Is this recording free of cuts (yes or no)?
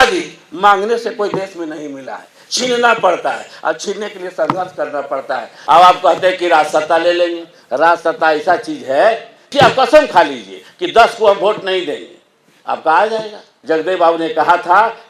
no